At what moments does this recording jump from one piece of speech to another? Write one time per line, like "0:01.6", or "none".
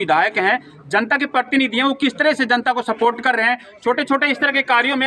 none